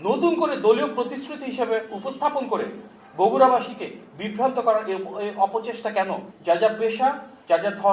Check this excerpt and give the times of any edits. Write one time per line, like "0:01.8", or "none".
0:06.3